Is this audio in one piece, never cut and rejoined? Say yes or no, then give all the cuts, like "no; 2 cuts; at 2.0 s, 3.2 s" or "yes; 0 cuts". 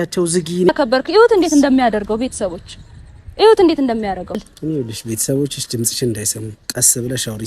no; 1 cut; at 4.4 s